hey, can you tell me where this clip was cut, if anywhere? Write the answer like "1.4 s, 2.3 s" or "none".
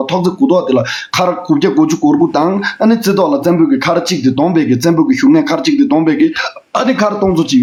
none